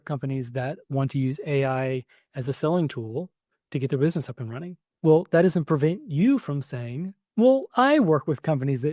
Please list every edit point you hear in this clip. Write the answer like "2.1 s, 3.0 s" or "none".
none